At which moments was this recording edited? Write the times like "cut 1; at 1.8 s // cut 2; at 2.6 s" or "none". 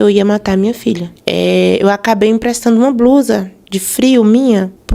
cut 1; at 1.1 s